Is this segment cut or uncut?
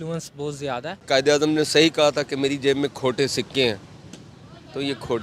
cut